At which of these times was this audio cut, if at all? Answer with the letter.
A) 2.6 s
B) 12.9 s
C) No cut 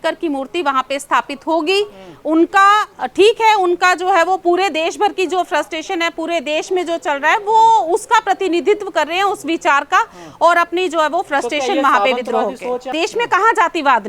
B